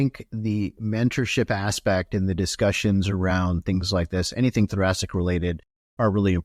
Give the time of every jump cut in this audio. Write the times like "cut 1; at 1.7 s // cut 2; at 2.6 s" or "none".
none